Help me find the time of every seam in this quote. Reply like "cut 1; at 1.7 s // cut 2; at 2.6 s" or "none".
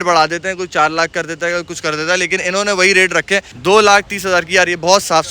cut 1; at 3.5 s